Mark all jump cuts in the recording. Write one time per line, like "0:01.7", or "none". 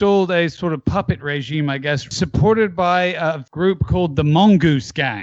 0:02.1
0:03.4